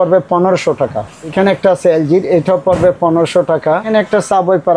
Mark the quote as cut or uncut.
cut